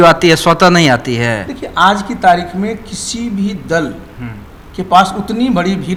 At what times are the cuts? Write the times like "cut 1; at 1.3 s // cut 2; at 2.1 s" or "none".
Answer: none